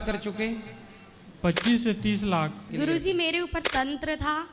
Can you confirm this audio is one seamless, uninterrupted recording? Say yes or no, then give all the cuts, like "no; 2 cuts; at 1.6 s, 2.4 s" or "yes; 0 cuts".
no; 1 cut; at 2.6 s